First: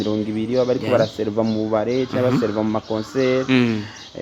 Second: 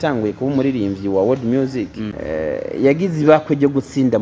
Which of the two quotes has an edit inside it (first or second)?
second